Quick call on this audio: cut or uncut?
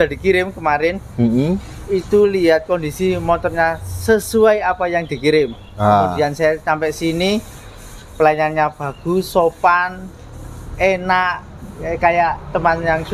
uncut